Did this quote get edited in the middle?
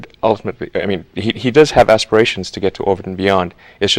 no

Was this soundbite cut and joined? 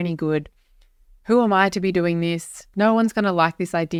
no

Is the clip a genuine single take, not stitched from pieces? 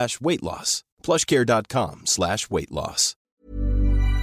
no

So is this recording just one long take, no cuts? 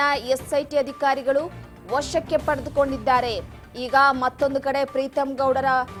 yes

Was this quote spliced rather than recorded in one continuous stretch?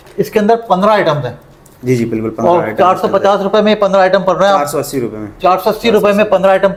no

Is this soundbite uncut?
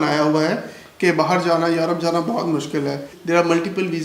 no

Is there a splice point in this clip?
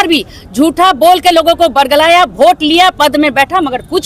no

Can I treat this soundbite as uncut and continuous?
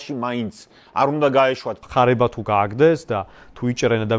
no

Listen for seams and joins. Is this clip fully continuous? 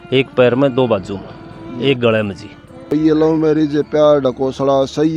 no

